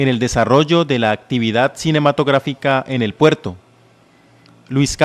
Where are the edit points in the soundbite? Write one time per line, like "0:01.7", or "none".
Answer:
0:02.7